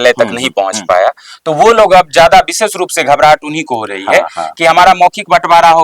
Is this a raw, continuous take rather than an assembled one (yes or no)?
yes